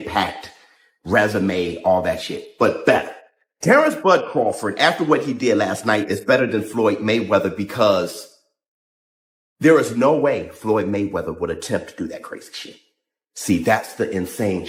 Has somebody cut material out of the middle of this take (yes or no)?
no